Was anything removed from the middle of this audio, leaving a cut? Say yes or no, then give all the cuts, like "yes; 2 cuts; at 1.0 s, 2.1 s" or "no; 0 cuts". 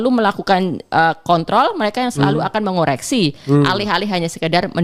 no; 0 cuts